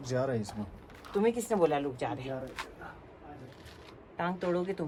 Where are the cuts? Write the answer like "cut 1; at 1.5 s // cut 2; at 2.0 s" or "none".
none